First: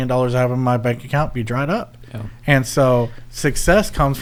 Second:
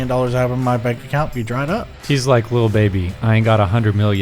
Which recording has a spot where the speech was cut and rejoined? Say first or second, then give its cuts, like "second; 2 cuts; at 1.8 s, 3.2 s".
second; 1 cut; at 2.0 s